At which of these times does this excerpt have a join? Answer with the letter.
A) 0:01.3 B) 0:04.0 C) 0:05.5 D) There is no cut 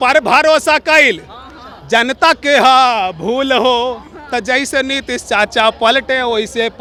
D